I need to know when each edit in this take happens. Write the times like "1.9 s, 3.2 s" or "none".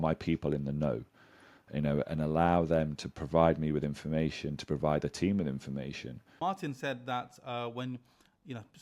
6.2 s